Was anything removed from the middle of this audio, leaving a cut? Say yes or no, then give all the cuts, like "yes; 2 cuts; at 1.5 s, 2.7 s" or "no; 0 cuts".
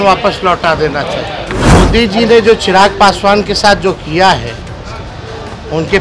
yes; 1 cut; at 1.6 s